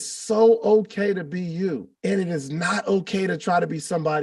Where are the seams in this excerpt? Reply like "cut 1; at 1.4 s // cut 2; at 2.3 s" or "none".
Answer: cut 1; at 1.9 s